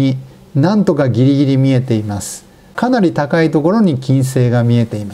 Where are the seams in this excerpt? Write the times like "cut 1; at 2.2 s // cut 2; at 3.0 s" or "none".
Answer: cut 1; at 2.7 s